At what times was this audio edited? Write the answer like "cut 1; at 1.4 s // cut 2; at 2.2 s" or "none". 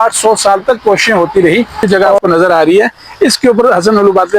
cut 1; at 1.8 s